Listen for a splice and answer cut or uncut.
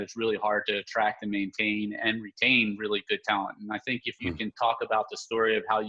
uncut